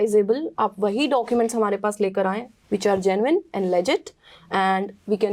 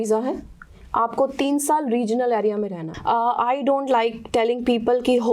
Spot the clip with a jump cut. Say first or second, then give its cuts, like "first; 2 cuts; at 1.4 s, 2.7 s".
second; 1 cut; at 2.8 s